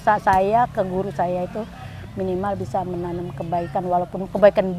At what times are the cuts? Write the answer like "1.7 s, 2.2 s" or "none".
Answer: none